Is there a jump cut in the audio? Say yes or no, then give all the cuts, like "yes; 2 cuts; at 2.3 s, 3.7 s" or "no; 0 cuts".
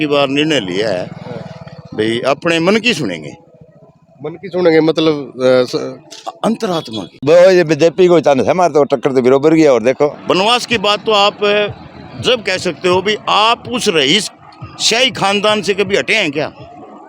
yes; 2 cuts; at 7.0 s, 10.2 s